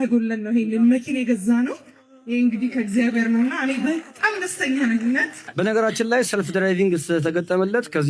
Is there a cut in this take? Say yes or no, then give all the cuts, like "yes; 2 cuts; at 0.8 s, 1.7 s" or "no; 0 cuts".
yes; 1 cut; at 5.4 s